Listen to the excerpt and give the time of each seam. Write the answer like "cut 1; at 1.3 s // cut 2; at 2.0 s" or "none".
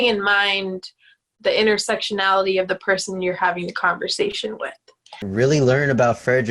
cut 1; at 5.2 s